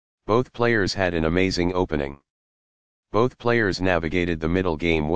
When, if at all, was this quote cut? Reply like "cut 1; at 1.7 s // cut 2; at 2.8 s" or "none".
cut 1; at 0.9 s